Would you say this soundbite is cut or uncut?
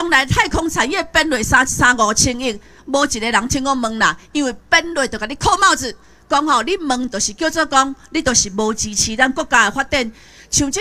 uncut